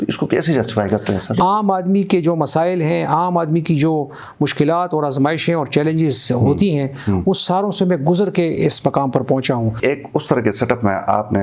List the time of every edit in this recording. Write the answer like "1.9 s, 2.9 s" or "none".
1.4 s, 9.8 s